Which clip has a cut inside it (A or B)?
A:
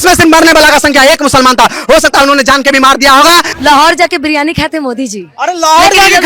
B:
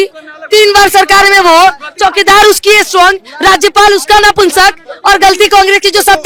A